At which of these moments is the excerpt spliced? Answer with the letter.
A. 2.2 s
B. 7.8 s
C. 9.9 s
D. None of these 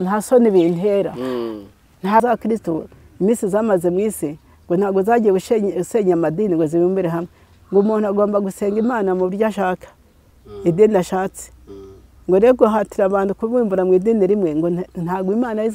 A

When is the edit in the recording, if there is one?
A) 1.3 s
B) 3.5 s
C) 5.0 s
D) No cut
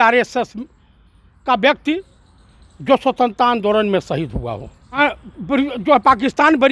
C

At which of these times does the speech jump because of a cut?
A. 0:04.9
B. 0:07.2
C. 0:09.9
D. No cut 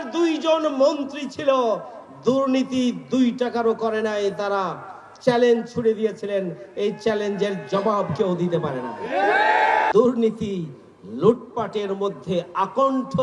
C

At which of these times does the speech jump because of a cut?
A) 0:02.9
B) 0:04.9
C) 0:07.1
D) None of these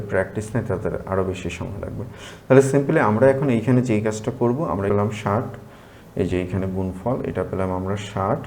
B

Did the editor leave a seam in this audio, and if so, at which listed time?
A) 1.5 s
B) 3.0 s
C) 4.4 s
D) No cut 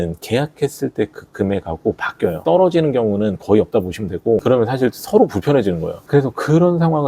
C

